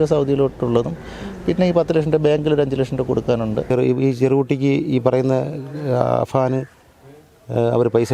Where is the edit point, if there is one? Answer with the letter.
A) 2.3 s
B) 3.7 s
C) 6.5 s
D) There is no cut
B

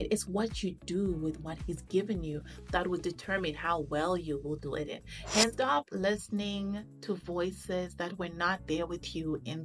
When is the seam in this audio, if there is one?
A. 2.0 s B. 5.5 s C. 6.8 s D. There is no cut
B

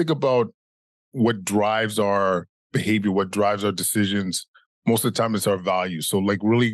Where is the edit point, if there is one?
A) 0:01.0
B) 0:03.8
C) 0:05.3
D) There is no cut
A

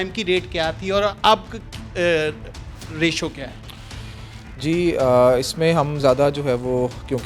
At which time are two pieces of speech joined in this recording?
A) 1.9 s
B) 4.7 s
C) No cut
C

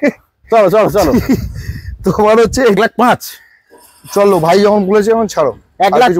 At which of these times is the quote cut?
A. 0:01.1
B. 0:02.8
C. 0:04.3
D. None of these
B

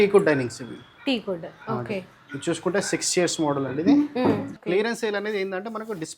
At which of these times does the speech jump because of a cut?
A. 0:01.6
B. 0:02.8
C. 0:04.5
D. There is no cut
C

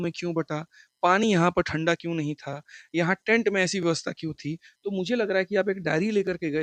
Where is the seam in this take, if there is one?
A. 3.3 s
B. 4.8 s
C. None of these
C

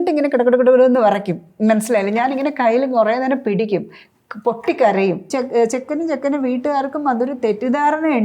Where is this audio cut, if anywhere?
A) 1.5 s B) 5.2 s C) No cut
B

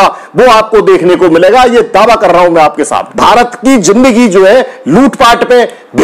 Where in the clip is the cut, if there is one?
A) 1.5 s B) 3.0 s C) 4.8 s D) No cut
B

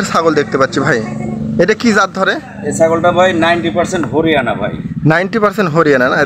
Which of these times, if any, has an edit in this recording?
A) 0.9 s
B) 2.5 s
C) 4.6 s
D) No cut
D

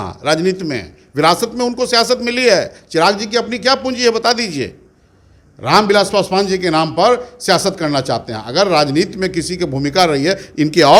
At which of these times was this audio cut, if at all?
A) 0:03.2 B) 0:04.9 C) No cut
C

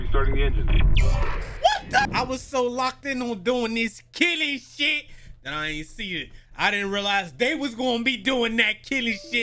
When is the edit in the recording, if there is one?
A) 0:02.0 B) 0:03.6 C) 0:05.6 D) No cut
A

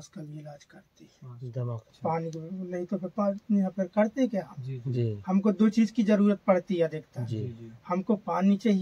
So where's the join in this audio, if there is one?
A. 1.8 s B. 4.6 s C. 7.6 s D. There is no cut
A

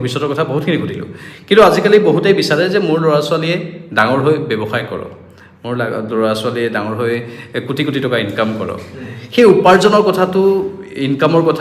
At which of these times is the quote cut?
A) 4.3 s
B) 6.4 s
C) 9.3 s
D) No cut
D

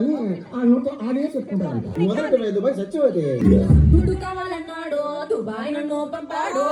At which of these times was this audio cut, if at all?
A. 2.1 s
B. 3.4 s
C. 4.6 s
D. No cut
B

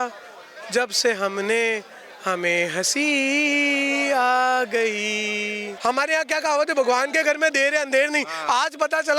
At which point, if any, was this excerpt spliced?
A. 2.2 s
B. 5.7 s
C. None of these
B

